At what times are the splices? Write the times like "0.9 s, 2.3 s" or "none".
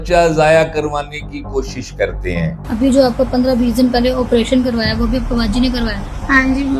2.6 s